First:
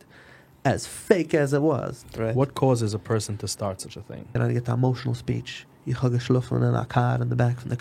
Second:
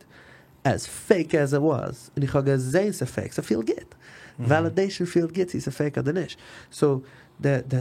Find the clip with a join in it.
first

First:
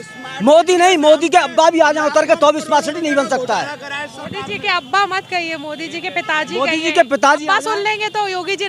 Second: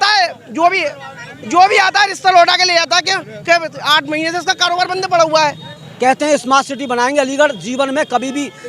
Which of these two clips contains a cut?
second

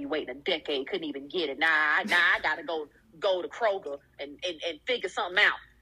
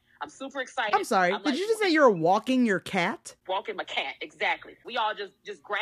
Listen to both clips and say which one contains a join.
second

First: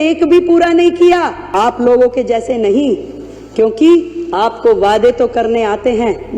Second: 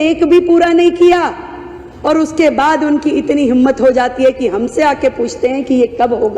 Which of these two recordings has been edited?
first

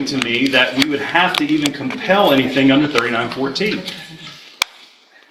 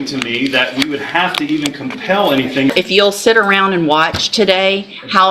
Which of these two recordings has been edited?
second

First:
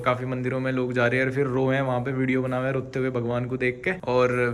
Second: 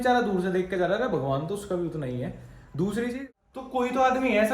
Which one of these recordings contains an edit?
second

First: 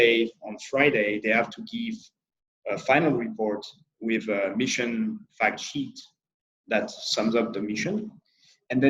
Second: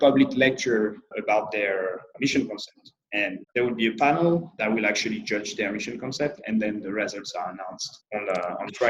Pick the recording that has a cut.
second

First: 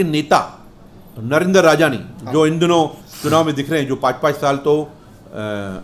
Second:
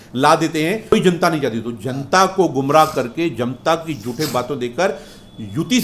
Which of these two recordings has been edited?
second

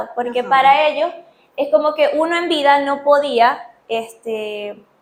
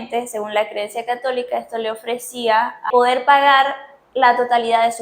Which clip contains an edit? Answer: second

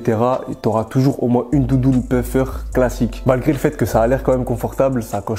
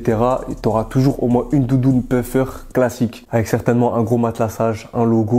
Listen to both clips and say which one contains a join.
first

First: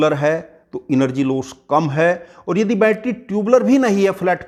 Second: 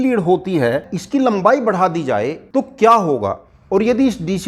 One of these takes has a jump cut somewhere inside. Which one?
second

